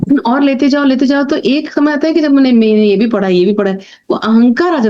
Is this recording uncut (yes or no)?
yes